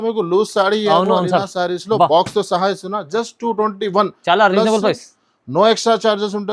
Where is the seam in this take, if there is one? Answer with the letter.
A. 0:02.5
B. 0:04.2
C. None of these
C